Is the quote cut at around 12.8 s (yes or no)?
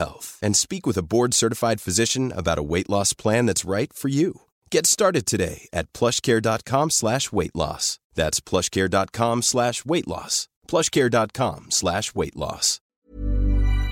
yes